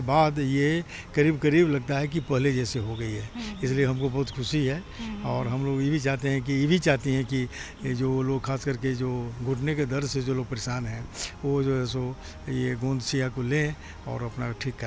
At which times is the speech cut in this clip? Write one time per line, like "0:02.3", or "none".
none